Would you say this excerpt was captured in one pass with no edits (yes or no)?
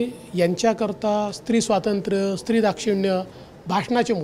yes